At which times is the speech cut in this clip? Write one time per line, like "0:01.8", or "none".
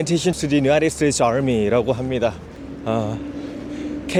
none